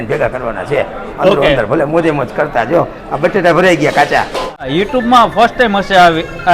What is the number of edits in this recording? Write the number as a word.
one